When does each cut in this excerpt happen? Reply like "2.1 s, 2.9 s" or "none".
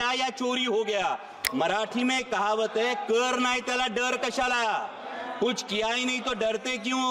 1.4 s